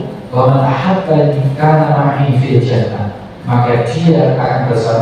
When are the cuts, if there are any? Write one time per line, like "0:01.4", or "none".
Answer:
0:01.5

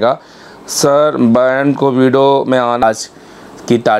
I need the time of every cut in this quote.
0:02.8

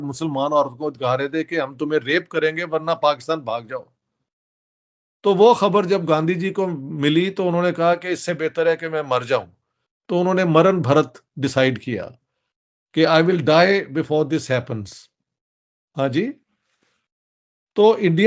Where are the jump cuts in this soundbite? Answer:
none

